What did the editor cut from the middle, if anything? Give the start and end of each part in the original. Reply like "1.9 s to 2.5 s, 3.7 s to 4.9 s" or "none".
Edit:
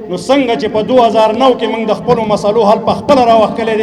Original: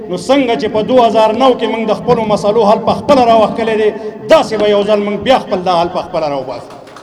none